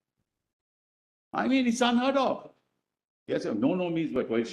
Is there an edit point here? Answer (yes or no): no